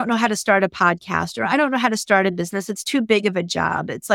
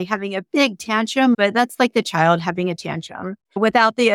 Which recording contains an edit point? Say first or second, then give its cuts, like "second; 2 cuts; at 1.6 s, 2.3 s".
second; 1 cut; at 1.4 s